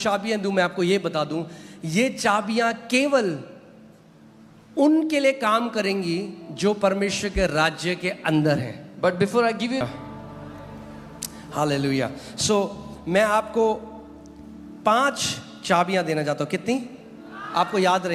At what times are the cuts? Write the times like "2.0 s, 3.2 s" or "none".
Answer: 9.8 s

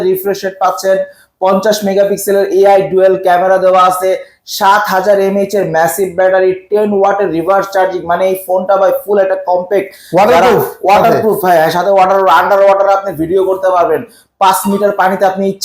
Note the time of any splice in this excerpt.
none

